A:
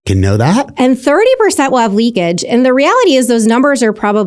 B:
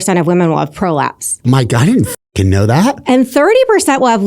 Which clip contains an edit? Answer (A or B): B